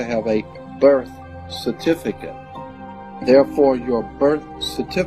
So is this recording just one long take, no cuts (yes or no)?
no